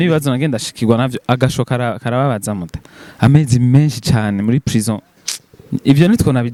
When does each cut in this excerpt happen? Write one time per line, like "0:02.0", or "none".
none